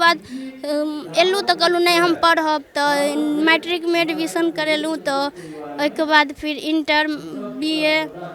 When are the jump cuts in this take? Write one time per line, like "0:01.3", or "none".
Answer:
none